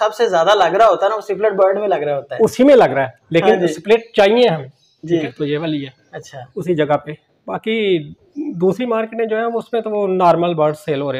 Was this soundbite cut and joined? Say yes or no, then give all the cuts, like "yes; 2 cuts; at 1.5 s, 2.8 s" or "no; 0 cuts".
yes; 1 cut; at 5.2 s